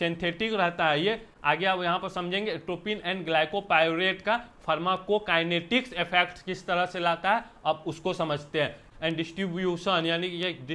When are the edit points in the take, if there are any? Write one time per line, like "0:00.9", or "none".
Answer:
0:01.3
0:08.8